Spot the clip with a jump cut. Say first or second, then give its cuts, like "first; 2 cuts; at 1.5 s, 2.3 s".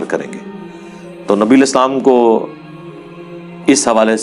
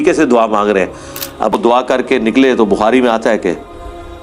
second; 1 cut; at 1.5 s